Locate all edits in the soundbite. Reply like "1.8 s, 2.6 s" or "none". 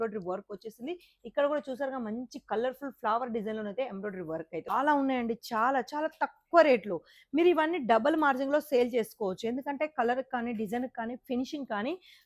4.5 s